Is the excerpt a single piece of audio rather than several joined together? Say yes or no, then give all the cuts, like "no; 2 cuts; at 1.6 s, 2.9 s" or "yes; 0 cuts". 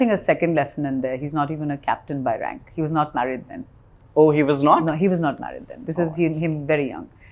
yes; 0 cuts